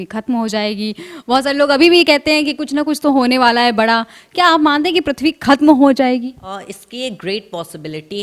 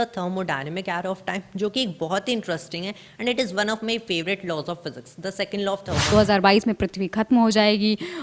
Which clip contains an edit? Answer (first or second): second